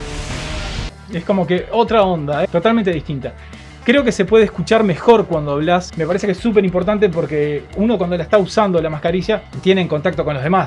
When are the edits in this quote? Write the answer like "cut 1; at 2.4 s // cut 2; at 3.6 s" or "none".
cut 1; at 0.9 s